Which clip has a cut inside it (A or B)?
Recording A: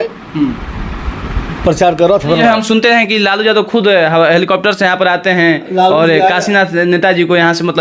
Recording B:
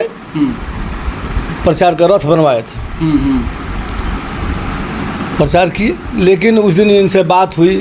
A